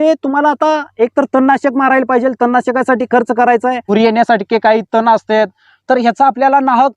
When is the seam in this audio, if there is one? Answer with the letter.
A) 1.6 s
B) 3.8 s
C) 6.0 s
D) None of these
B